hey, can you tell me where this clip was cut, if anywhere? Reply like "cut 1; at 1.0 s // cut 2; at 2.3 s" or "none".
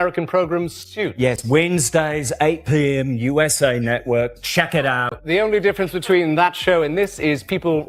none